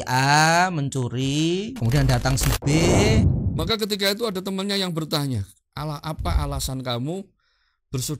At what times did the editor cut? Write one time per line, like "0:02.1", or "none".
0:03.3